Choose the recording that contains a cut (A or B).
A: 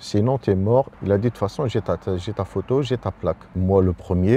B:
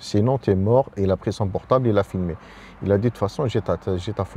A